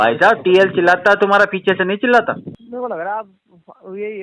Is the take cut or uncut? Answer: cut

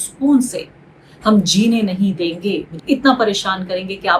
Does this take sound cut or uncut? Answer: cut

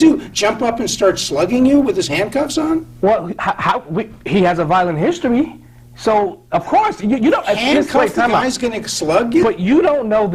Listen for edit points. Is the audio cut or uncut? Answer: uncut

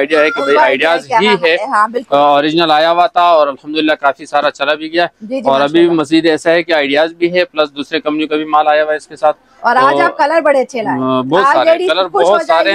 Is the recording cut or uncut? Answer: uncut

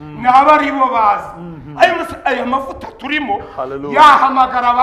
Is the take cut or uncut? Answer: uncut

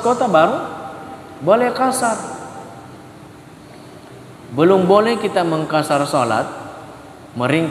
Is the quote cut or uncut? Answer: uncut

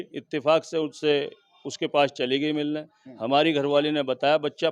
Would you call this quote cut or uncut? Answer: uncut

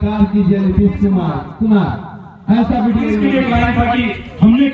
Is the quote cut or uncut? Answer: cut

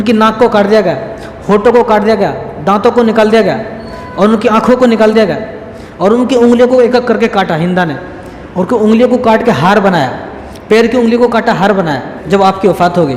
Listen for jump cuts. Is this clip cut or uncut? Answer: cut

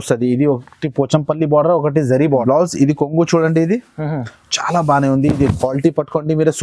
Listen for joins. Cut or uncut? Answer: cut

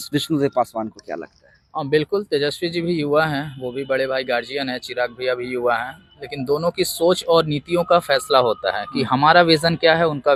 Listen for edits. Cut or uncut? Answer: uncut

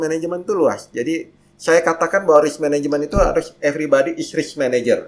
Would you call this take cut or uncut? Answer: uncut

